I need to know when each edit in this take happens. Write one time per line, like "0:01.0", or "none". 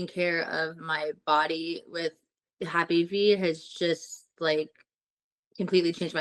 none